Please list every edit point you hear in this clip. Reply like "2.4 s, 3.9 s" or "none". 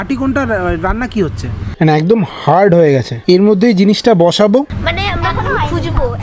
1.7 s, 4.7 s

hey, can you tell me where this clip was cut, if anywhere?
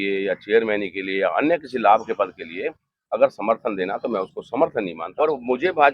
5.0 s

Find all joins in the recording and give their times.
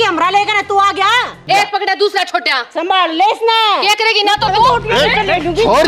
1.4 s

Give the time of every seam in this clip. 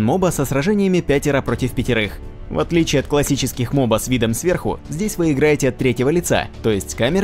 5.1 s

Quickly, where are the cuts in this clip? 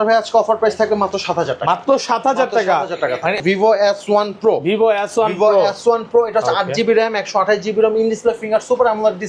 3.4 s

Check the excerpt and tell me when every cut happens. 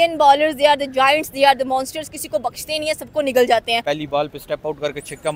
3.8 s

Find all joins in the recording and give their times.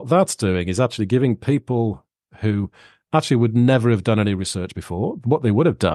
none

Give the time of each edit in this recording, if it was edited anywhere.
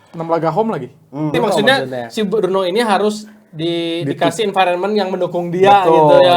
1.3 s

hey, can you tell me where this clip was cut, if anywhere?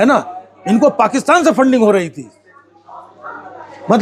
none

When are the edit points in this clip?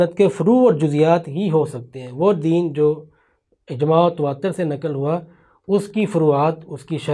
none

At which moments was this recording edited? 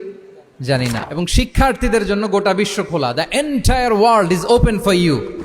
1.0 s

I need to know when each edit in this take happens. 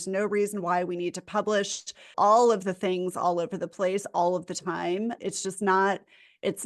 2.1 s

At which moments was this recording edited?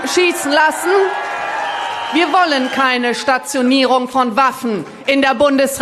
2.1 s

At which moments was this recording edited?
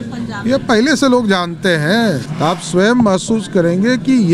2.3 s

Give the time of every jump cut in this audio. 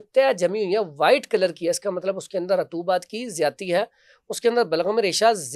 none

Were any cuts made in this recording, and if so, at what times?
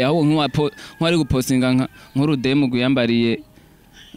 none

